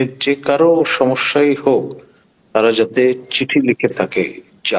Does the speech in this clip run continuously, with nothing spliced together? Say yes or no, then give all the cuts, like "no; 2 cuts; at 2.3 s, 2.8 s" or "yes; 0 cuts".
yes; 0 cuts